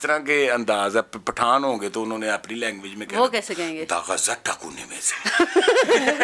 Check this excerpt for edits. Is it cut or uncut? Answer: uncut